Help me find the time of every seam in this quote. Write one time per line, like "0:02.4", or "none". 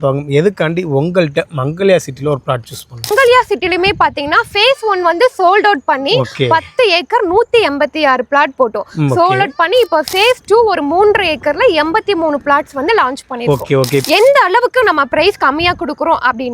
0:03.1
0:14.0